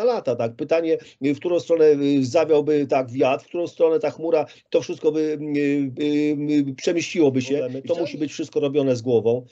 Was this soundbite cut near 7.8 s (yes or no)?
yes